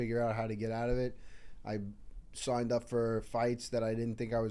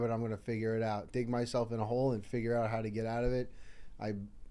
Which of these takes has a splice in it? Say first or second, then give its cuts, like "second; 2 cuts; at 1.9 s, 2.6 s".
second; 1 cut; at 1.1 s